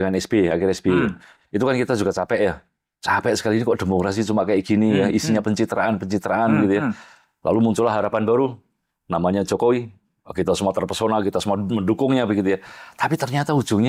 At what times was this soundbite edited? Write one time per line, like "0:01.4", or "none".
none